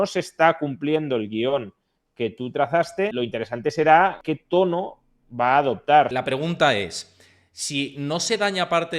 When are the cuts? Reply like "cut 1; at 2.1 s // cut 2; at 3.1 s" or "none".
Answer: cut 1; at 3.1 s // cut 2; at 4.3 s // cut 3; at 6.1 s